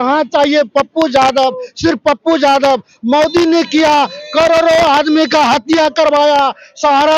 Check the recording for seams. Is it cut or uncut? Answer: uncut